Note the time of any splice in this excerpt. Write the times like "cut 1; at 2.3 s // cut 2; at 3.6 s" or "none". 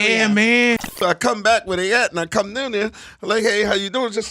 cut 1; at 1.0 s